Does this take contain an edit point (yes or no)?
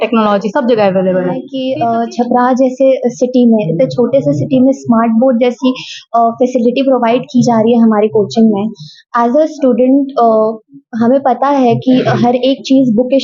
yes